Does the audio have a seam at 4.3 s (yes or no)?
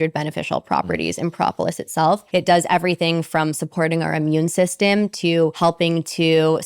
no